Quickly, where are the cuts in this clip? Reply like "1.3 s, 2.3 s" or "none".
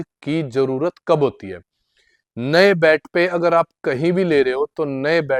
none

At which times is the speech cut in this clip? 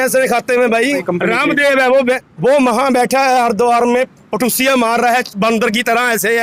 1.0 s, 2.3 s

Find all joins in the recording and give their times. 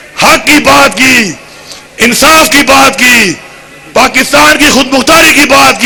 none

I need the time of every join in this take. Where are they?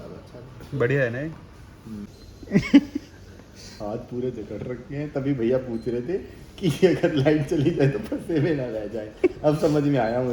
2.3 s

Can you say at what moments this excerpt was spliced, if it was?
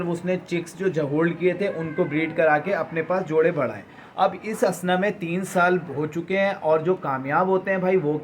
none

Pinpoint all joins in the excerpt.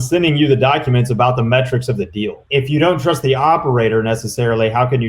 2.4 s

